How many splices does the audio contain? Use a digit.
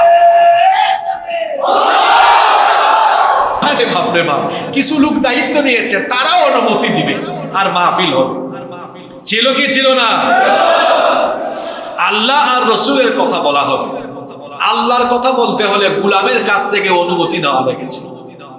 1